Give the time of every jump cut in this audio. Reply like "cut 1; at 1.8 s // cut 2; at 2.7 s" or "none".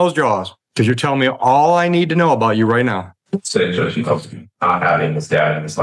none